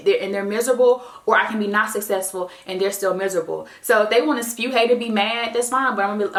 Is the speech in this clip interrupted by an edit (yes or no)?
no